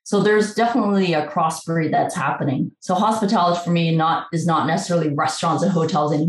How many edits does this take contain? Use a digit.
0